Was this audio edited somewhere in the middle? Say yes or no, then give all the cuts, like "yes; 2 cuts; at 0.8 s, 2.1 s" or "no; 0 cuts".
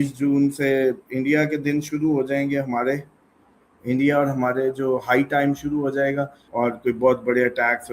yes; 1 cut; at 6.4 s